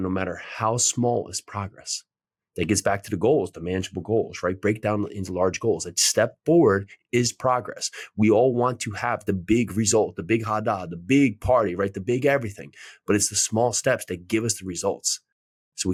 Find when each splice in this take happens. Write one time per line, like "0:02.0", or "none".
none